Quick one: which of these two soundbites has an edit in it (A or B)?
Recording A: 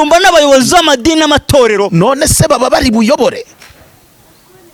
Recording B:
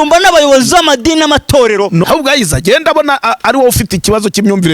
B